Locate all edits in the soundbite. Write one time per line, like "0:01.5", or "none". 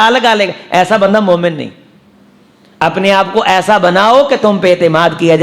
none